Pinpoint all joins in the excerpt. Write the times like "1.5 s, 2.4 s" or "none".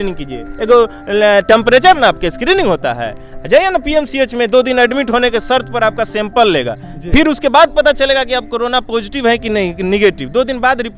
none